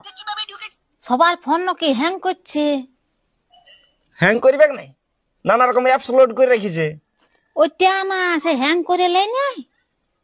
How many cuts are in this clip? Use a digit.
0